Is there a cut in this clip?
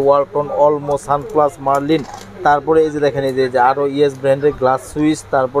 no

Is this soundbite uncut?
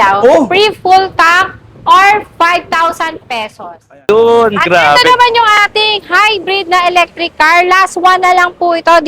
no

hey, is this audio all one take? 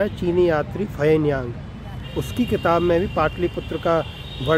yes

